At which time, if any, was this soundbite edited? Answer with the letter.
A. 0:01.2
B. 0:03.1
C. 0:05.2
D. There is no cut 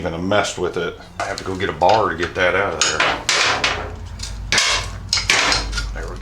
A